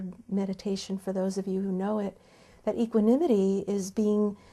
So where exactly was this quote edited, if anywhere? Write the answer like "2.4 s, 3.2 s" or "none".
none